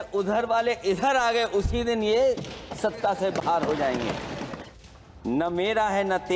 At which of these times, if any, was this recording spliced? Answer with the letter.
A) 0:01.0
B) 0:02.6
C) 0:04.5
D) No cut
C